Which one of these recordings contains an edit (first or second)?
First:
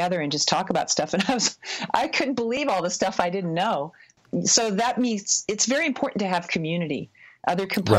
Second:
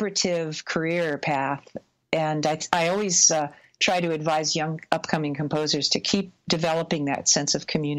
first